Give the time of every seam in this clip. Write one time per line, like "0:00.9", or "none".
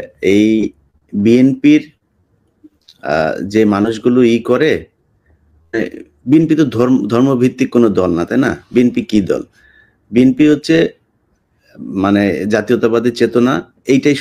none